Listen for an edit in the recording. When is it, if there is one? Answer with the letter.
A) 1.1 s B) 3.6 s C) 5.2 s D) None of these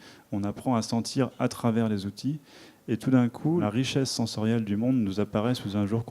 B